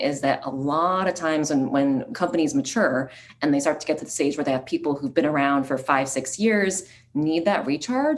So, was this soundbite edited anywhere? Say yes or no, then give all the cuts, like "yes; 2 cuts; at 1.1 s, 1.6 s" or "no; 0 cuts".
yes; 1 cut; at 2.1 s